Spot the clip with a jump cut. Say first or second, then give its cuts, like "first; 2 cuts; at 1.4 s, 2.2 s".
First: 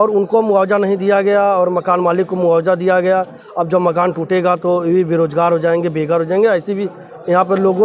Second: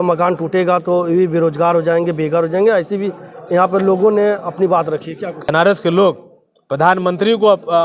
second; 1 cut; at 5.5 s